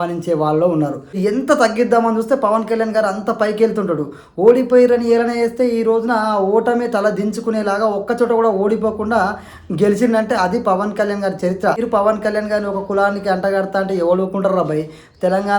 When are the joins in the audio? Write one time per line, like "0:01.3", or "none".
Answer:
0:01.1
0:11.8